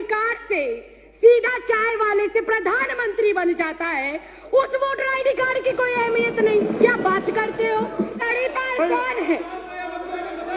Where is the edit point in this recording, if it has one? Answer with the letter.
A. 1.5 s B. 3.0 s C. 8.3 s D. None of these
C